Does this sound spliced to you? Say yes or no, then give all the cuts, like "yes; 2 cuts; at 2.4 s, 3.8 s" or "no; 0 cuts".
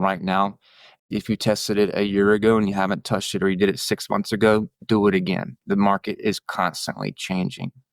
yes; 1 cut; at 1.0 s